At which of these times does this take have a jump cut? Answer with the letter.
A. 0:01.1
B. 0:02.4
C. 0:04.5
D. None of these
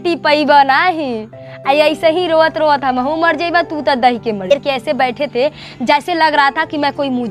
C